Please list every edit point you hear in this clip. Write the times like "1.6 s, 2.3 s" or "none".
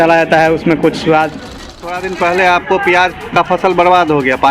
1.8 s